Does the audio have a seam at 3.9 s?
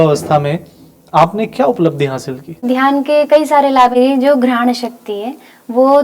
yes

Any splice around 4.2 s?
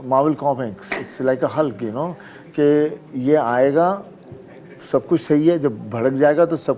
no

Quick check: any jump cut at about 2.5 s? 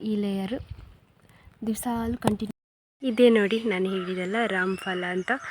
yes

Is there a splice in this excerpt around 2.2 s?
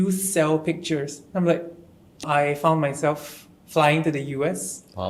yes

